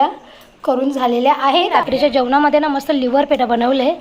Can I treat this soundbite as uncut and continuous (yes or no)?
no